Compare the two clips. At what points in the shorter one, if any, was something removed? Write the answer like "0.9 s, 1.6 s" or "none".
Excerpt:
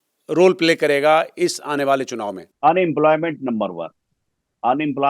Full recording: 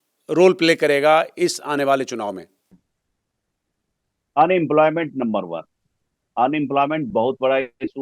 2.4 s